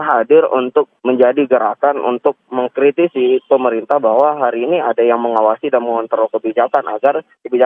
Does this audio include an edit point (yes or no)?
yes